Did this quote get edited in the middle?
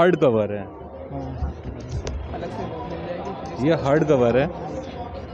no; 0 cuts

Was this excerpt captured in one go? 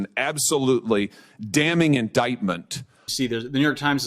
no; 1 cut; at 3.0 s

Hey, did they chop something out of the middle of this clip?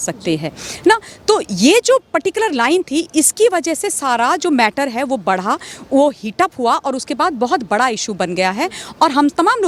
no; 0 cuts

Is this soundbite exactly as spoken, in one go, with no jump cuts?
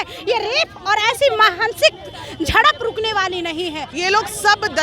no; 1 cut; at 3.9 s

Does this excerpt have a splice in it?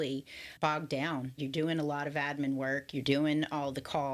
yes; 1 cut; at 1.4 s

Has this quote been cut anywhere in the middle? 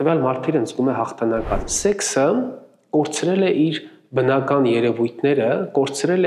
yes; 1 cut; at 1.7 s

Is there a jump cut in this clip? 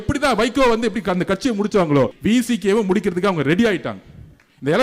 yes; 1 cut; at 2.2 s

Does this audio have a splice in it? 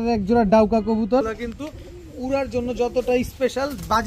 yes; 1 cut; at 1.2 s

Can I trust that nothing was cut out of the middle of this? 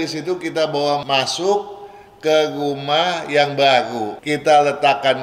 no; 2 cuts; at 1.0 s, 4.1 s

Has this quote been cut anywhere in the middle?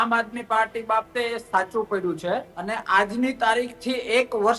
yes; 1 cut; at 2.5 s

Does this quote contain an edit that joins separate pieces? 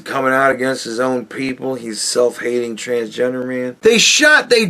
yes; 1 cut; at 3.7 s

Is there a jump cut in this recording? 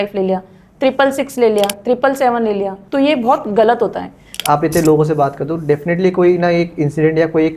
yes; 2 cuts; at 2.8 s, 4.3 s

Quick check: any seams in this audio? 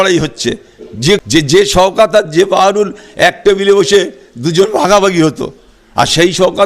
yes; 1 cut; at 1.2 s

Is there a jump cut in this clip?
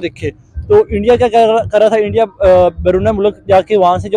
no; 0 cuts

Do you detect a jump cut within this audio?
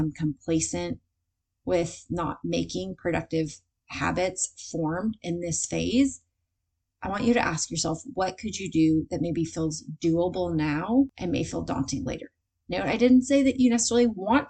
yes; 1 cut; at 11.2 s

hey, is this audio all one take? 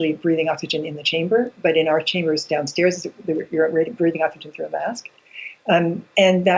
yes; 0 cuts

